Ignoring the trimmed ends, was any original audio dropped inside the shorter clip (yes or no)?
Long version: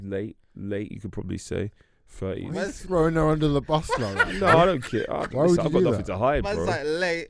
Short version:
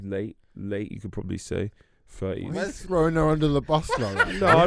no